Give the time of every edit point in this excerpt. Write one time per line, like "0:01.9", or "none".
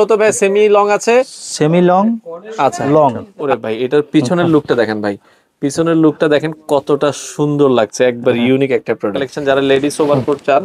0:03.3
0:09.3